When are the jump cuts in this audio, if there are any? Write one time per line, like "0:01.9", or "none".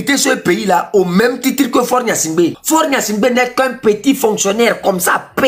0:02.6